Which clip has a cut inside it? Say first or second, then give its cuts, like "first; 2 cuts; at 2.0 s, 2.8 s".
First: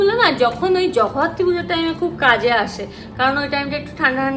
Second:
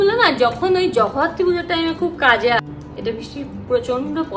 second; 1 cut; at 2.6 s